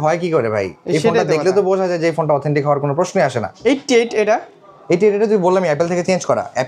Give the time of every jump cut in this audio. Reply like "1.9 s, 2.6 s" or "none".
none